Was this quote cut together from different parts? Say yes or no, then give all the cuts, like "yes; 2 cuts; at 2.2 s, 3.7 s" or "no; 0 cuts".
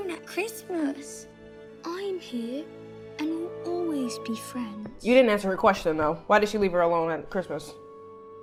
no; 0 cuts